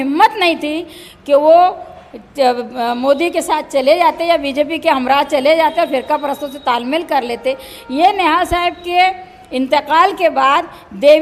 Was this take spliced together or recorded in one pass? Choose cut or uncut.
uncut